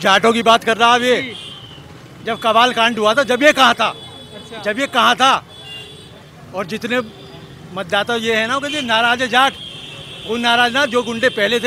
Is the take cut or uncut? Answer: uncut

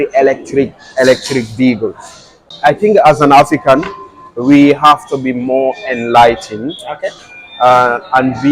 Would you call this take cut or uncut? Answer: cut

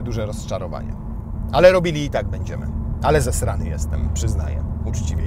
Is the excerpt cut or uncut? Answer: uncut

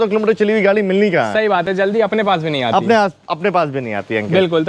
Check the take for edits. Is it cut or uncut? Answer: uncut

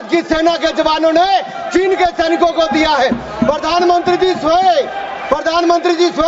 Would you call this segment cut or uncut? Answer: uncut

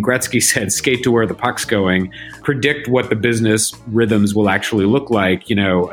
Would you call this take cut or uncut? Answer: cut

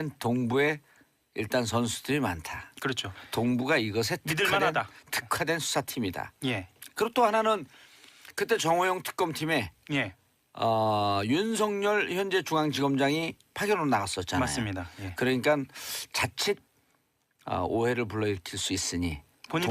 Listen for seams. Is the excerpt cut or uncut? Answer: cut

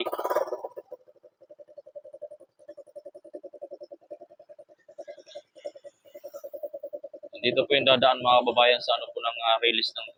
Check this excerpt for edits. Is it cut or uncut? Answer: uncut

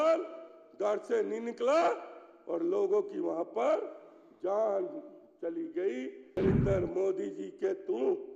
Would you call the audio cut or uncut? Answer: cut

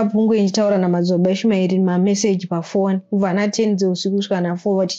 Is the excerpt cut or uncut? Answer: uncut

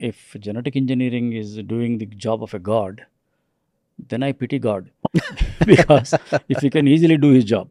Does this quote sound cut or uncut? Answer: uncut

